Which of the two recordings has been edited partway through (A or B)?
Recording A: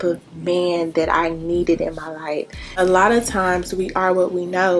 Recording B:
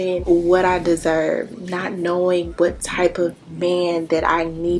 A